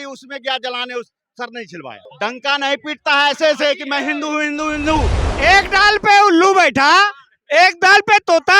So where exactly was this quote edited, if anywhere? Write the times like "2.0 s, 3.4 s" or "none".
2.1 s, 5.2 s